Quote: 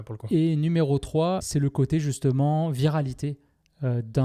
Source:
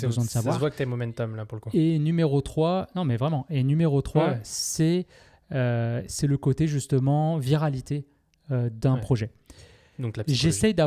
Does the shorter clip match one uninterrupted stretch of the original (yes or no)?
no